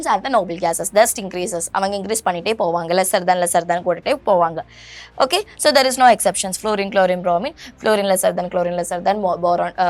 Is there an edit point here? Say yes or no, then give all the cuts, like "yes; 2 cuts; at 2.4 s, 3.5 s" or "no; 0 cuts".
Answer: no; 0 cuts